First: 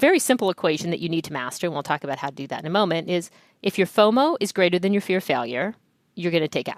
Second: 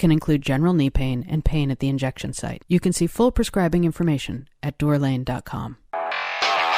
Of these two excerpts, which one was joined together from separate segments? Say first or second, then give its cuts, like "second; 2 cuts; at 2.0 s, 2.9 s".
second; 1 cut; at 5.8 s